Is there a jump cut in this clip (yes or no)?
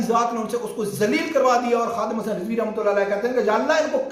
no